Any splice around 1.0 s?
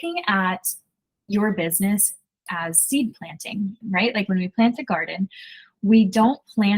no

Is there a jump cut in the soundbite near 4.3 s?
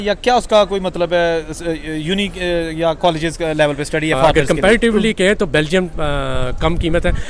yes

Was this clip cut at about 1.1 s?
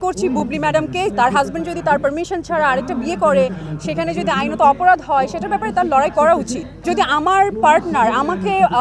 yes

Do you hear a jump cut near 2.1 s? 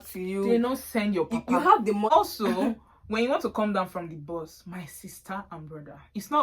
yes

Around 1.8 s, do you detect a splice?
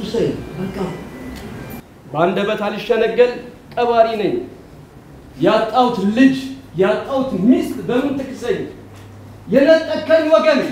yes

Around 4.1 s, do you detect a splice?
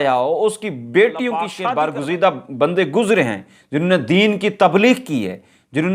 no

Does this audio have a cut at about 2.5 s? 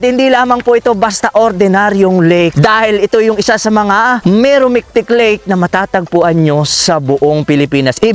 yes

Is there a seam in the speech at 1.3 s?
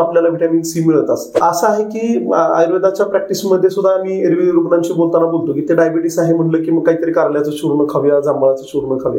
yes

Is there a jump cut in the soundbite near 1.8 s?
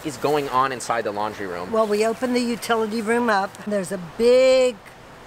no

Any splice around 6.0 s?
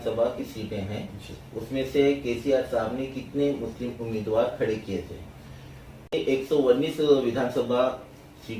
yes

